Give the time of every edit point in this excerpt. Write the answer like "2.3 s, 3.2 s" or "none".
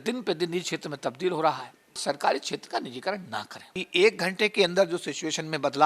2.0 s, 3.8 s